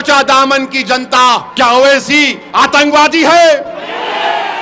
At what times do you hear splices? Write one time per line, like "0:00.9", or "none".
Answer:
0:01.5
0:02.4

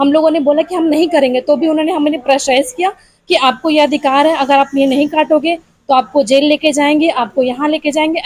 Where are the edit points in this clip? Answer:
none

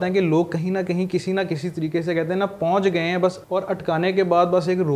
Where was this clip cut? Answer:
0:03.4

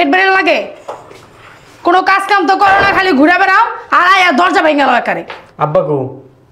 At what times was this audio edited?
none

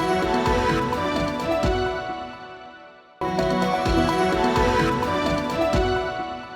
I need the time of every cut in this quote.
0:03.2

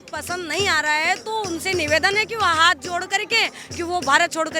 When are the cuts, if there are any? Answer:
none

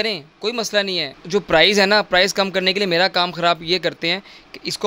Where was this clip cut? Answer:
0:01.1

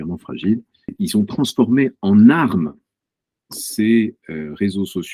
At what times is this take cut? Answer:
0:00.9

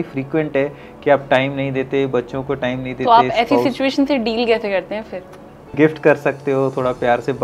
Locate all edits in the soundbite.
0:05.7

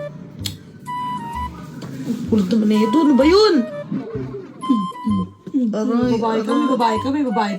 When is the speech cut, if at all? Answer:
0:03.8

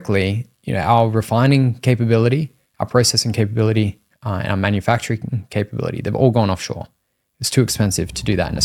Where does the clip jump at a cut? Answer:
none

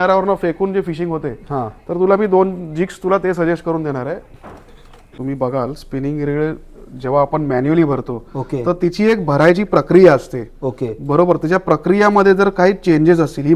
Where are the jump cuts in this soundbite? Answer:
0:05.1

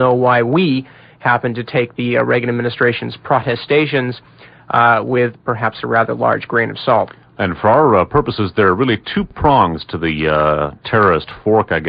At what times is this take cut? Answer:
0:05.1

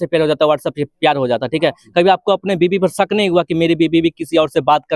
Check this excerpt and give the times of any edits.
none

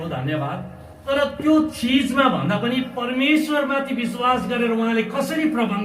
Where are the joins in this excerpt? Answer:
0:01.0

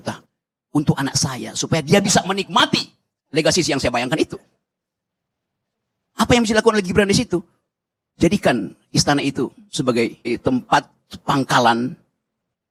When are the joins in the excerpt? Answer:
none

